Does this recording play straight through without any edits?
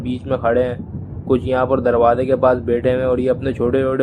yes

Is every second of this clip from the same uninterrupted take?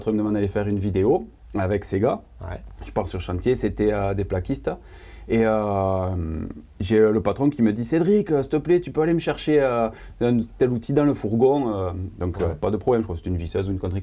yes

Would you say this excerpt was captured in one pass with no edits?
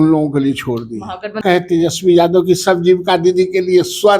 no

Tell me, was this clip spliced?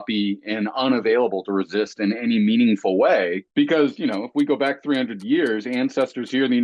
yes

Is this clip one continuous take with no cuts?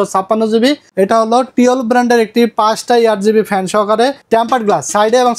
no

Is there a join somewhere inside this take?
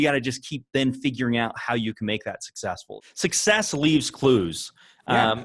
yes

